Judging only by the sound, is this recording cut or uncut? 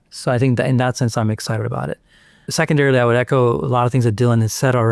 cut